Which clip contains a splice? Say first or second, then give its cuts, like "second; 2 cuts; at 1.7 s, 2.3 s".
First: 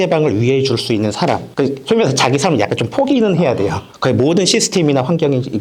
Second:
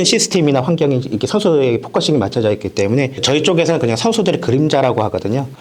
second; 1 cut; at 3.2 s